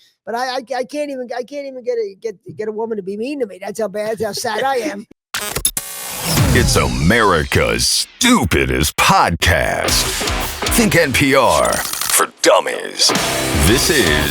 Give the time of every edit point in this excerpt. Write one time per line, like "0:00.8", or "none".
0:05.1